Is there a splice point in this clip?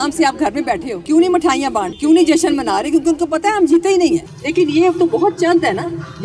yes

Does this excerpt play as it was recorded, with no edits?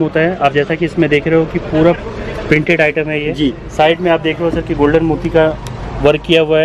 yes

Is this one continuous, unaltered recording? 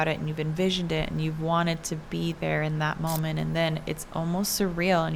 yes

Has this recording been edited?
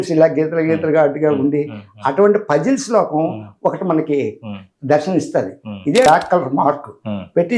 yes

